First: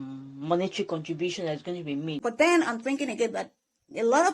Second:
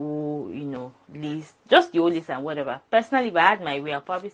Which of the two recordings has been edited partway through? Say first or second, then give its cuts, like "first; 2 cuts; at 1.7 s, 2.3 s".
first; 1 cut; at 2.2 s